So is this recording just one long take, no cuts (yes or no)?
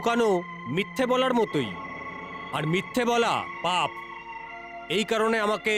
yes